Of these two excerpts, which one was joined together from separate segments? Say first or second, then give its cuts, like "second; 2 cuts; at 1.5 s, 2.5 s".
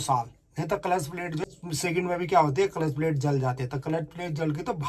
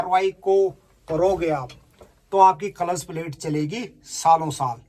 first; 1 cut; at 1.4 s